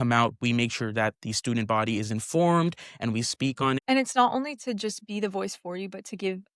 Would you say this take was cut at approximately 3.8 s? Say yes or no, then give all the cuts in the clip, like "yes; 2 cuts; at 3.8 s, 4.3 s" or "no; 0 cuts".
yes; 1 cut; at 3.8 s